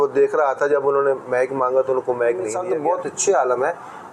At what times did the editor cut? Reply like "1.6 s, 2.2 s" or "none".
2.6 s